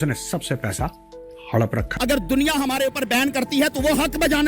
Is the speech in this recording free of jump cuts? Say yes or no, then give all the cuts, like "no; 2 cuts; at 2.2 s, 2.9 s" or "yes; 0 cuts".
no; 1 cut; at 1.9 s